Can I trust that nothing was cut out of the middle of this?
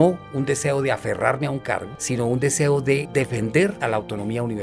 no; 2 cuts; at 3.1 s, 3.8 s

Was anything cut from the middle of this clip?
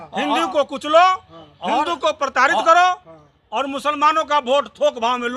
no; 0 cuts

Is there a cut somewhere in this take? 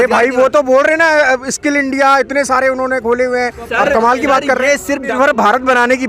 yes; 1 cut; at 5.1 s

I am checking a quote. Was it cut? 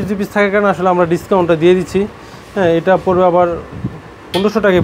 no; 0 cuts

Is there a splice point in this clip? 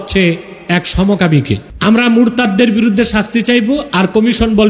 yes; 1 cut; at 1.7 s

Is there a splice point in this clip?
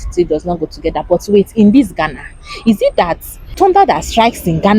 yes; 1 cut; at 3.5 s

